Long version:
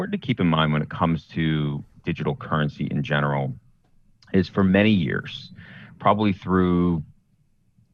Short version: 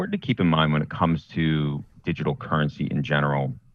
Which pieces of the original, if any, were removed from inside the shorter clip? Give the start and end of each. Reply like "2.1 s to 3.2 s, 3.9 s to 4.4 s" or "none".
none